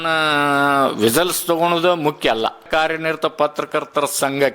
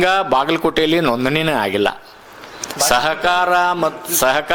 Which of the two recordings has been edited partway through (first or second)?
first